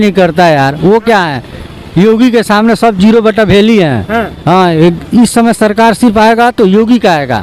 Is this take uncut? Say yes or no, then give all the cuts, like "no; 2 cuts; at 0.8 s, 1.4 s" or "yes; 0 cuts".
yes; 0 cuts